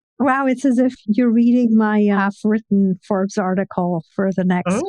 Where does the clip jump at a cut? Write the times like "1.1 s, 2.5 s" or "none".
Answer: 1.0 s